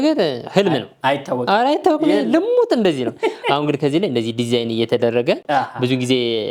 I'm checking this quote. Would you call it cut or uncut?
uncut